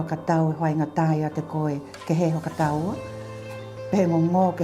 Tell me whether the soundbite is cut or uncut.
uncut